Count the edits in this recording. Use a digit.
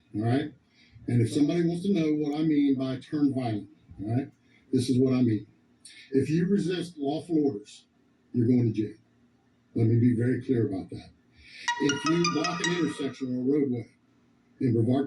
1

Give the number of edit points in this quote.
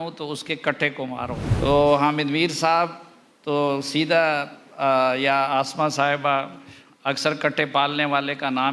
1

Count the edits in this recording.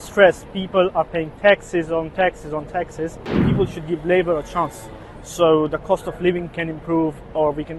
1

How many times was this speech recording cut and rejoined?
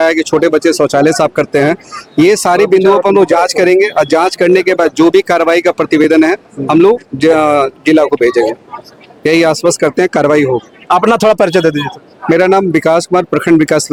0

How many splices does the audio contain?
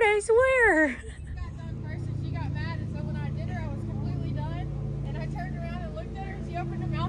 1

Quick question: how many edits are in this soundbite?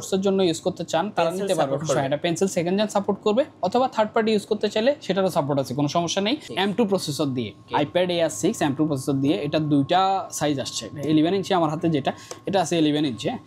2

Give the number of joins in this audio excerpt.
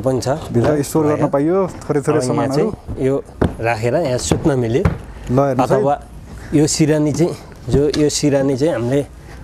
0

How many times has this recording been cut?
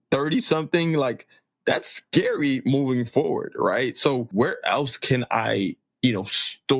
1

